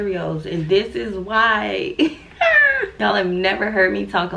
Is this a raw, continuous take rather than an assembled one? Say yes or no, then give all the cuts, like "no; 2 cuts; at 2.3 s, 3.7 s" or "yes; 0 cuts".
no; 1 cut; at 2.9 s